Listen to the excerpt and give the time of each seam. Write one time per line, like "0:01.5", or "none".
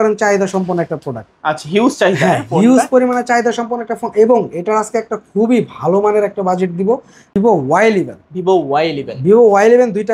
0:07.4

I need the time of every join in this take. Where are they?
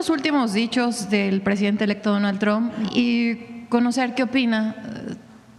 0:02.8

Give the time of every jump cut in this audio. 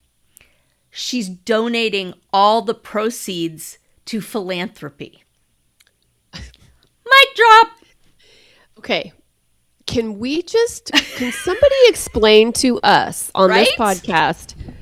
none

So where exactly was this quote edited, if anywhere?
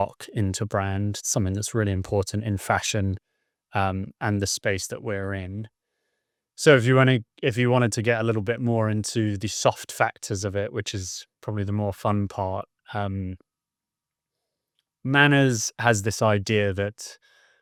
none

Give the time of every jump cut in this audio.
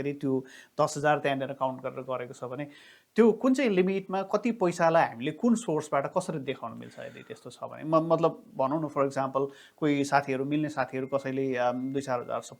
none

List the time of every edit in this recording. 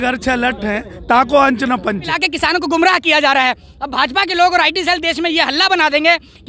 0:02.2

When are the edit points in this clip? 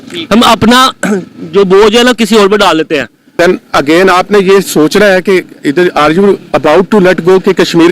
0:03.3

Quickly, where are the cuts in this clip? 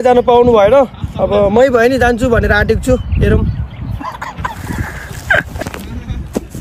0:05.6

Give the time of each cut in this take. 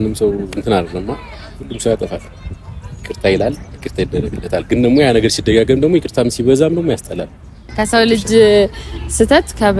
0:07.7

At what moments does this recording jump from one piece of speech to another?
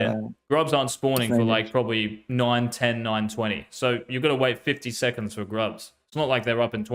none

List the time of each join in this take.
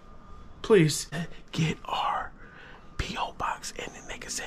0:01.3

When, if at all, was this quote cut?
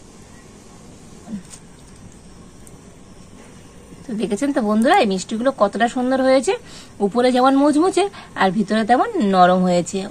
0:01.3

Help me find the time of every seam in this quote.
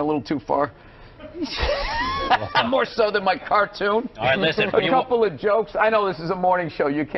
none

